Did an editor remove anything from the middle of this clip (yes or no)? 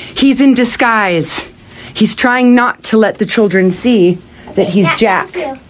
no